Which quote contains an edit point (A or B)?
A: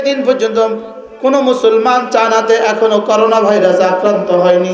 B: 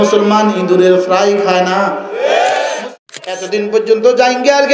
B